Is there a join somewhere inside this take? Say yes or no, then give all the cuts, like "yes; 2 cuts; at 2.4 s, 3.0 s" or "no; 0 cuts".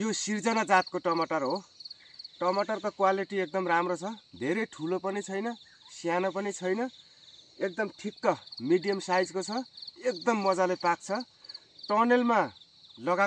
no; 0 cuts